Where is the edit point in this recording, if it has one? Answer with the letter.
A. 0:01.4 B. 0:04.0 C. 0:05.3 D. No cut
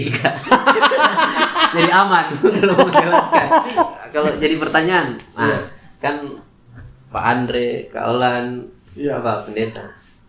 B